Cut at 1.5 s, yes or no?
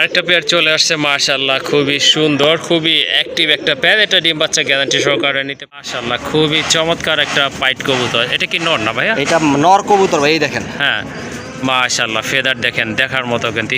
no